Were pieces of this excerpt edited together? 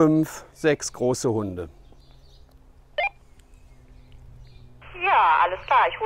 no; 0 cuts

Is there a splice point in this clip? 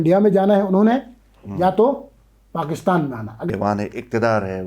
yes; 1 cut; at 3.5 s

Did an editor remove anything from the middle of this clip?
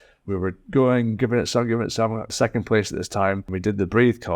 yes; 2 cuts; at 2.3 s, 3.5 s

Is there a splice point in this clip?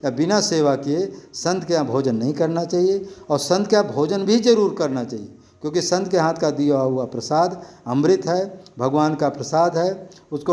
no; 0 cuts

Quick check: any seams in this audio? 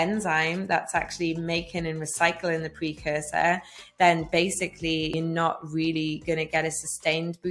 yes; 1 cut; at 5.1 s

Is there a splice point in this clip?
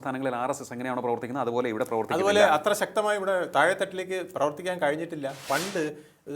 yes; 1 cut; at 5.4 s

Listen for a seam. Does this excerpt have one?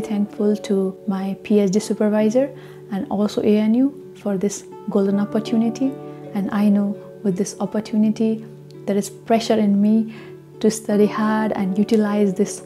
yes; 1 cut; at 1.0 s

